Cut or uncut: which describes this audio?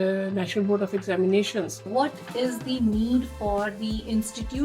cut